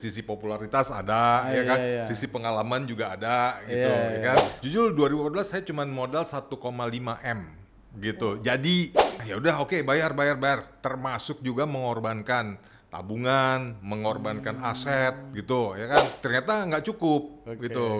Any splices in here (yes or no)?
yes